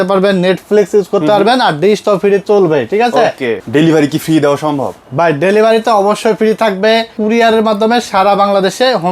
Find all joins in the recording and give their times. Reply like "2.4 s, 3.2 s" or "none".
3.5 s, 7.2 s